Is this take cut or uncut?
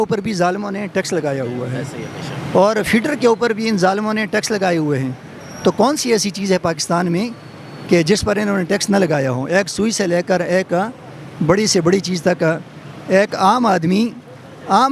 uncut